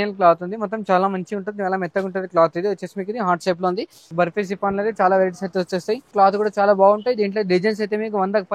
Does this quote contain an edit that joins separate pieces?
yes; 2 cuts; at 4.0 s, 6.1 s

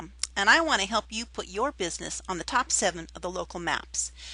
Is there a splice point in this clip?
no; 0 cuts

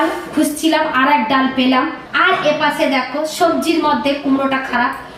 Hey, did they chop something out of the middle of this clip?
yes; 1 cut; at 2.0 s

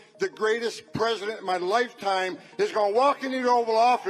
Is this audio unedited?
yes; 0 cuts

